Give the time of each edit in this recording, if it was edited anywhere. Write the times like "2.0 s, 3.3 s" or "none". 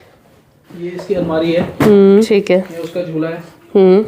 2.3 s

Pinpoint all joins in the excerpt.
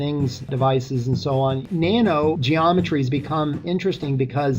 1.6 s, 2.4 s

